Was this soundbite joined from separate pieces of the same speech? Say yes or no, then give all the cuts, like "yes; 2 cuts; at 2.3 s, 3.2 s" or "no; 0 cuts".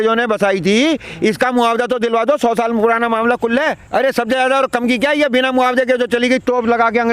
yes; 1 cut; at 3.8 s